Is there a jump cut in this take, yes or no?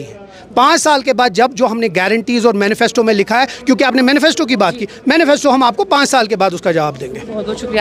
no